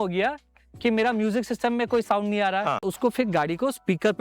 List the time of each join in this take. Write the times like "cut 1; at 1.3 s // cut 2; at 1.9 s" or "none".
cut 1; at 2.9 s